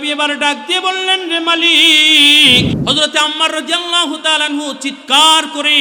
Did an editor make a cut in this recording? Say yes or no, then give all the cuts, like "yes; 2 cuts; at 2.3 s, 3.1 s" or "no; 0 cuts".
yes; 1 cut; at 2.7 s